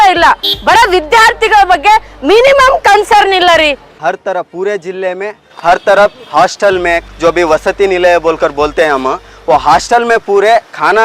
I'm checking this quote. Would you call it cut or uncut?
cut